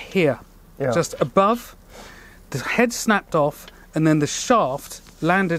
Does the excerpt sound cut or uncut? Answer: uncut